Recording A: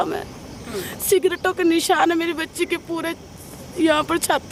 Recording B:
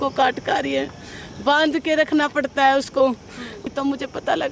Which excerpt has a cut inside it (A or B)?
B